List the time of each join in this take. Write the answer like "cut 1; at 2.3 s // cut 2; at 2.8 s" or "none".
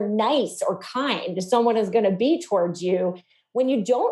none